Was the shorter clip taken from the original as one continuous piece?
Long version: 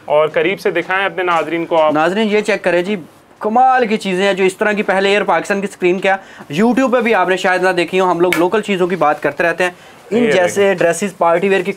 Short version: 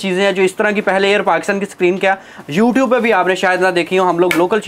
yes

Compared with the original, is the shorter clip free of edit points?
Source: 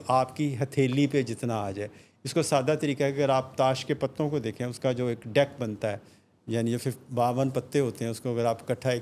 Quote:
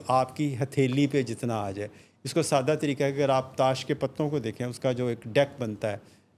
yes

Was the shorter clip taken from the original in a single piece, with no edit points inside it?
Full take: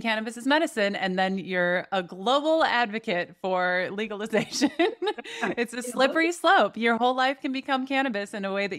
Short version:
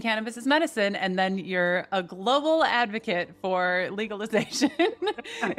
yes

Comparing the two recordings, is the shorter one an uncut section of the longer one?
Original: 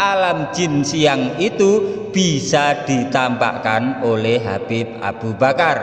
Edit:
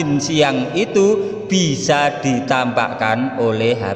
yes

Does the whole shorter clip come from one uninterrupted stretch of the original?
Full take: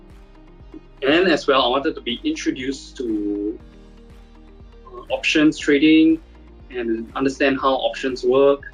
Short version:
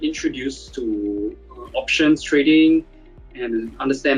no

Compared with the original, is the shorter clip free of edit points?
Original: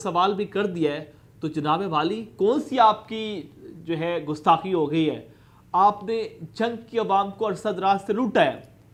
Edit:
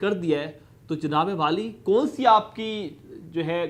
yes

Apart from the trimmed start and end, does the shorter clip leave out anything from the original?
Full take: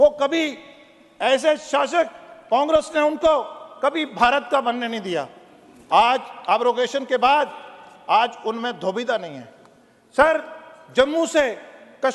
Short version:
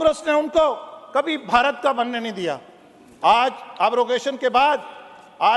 no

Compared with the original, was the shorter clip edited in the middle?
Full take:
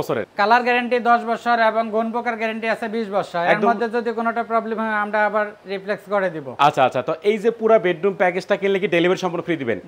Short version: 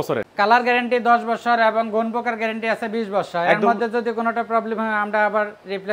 no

